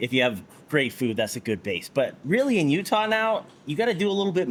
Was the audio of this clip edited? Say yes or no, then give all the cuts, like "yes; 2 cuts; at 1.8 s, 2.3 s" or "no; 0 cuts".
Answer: no; 0 cuts